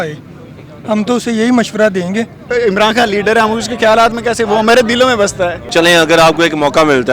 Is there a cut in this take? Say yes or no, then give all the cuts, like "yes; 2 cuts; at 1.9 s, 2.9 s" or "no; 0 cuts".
yes; 2 cuts; at 2.4 s, 5.6 s